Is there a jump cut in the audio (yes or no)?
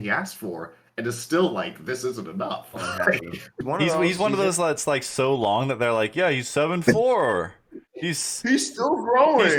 yes